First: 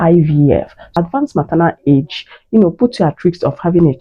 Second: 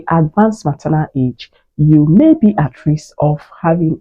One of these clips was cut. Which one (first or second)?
first